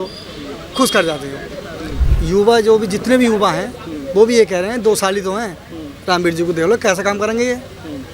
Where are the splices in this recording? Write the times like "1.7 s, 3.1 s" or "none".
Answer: 1.9 s